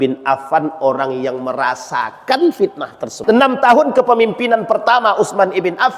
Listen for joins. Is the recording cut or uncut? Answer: cut